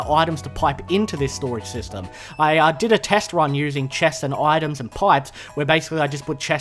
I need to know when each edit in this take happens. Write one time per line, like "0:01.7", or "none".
0:01.2